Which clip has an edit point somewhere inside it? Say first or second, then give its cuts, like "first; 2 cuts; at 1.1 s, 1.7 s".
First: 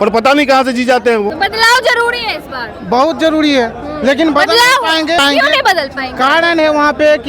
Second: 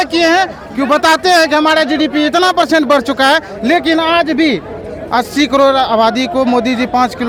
first; 2 cuts; at 1.3 s, 5.2 s